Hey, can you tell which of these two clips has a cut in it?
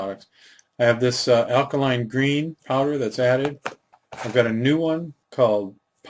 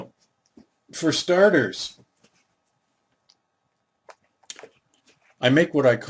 second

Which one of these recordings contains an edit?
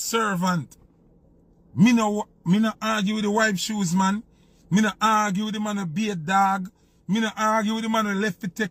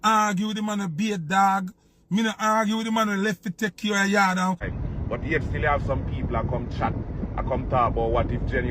second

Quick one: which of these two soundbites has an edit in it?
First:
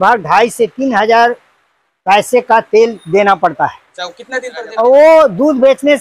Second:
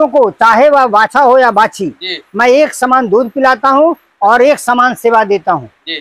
first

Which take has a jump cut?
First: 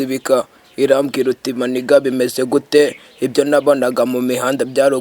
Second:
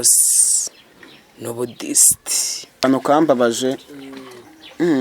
second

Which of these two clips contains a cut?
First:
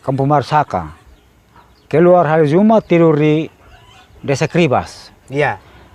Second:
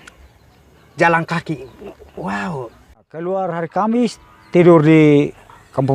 second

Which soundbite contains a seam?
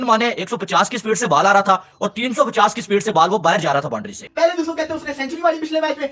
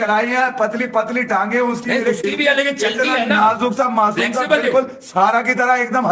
first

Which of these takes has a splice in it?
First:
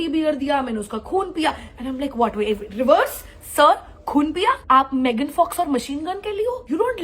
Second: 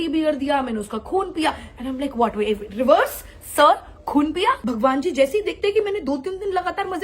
second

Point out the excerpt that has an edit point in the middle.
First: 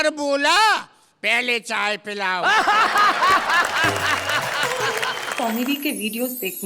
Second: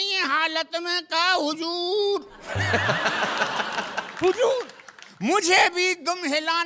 first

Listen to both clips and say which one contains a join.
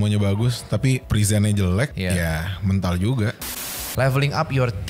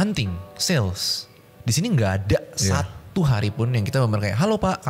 first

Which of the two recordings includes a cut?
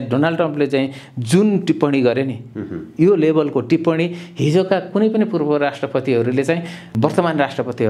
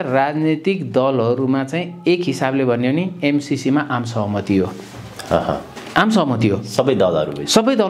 first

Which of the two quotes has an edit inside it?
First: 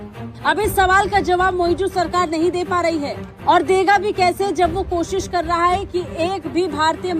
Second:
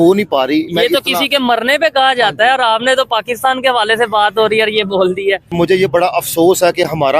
second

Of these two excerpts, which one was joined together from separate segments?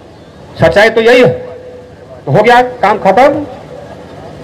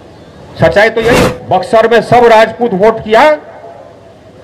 second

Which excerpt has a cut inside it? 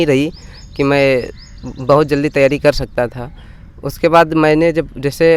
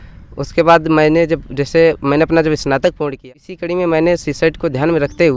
second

